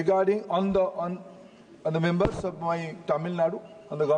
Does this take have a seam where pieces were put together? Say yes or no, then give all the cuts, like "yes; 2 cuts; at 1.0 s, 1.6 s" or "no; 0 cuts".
no; 0 cuts